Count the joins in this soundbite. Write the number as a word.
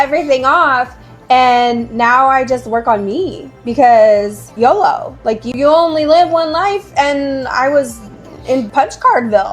three